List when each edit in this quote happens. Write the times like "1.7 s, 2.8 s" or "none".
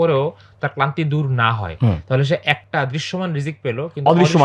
none

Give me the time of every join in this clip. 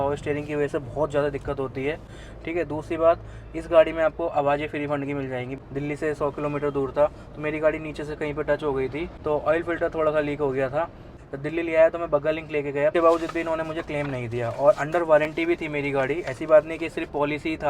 5.6 s, 9.1 s, 11.1 s, 12.9 s

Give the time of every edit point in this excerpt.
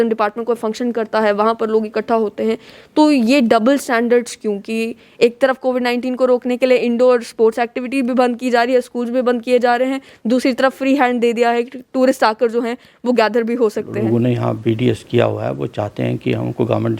13.9 s

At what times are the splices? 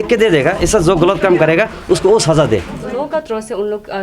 3.1 s

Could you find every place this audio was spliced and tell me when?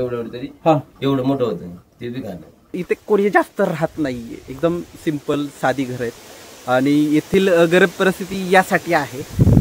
2.8 s

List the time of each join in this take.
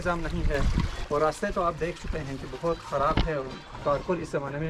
none

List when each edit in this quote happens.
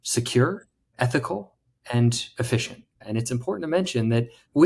3.0 s

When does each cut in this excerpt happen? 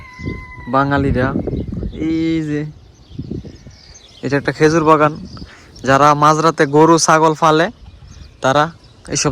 none

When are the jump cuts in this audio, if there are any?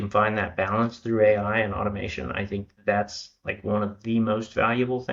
none

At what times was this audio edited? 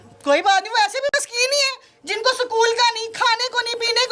none

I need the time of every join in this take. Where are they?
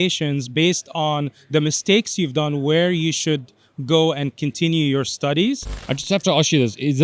6.0 s

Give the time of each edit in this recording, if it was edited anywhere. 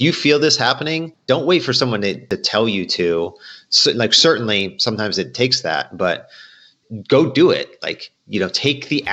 1.1 s, 2.2 s, 6.8 s

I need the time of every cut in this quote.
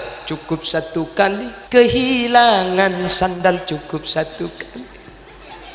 1.5 s

